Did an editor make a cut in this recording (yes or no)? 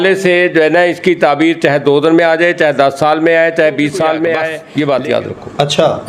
yes